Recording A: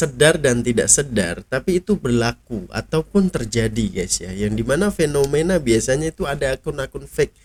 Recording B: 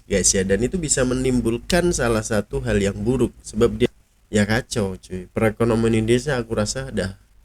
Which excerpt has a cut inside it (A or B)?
B